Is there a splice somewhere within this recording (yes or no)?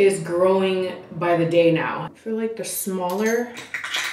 yes